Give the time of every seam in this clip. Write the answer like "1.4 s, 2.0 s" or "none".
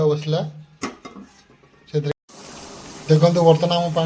2.1 s